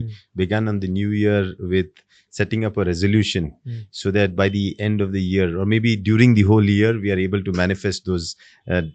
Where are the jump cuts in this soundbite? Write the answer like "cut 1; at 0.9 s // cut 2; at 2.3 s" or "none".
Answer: none